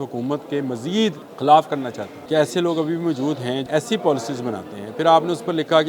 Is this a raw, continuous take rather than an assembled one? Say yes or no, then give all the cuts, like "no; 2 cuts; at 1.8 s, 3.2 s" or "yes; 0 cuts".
no; 3 cuts; at 1.3 s, 2.1 s, 3.6 s